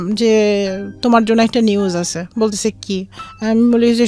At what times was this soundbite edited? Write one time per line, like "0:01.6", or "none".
none